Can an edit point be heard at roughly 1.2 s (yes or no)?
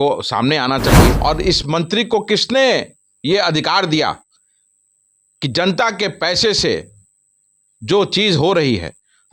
yes